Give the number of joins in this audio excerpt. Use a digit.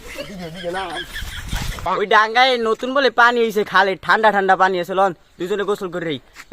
1